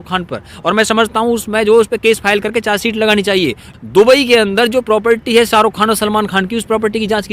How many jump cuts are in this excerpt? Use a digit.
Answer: 1